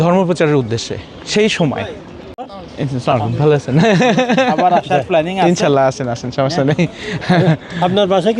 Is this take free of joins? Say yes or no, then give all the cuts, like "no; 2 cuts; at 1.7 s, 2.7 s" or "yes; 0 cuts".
yes; 0 cuts